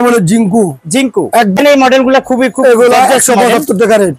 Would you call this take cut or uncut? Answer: cut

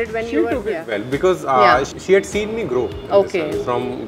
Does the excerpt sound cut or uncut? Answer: cut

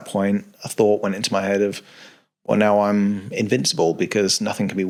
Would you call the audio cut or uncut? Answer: uncut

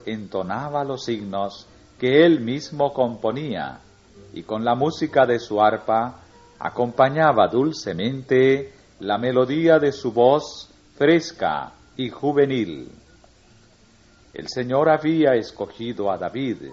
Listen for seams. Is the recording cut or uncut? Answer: cut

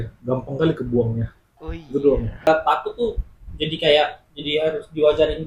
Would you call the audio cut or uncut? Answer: cut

